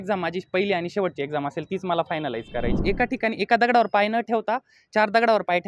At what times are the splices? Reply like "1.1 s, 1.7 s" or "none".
2.7 s